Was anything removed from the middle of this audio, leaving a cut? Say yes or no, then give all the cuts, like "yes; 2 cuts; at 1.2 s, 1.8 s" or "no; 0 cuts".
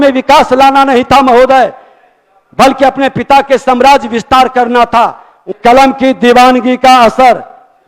yes; 1 cut; at 5.5 s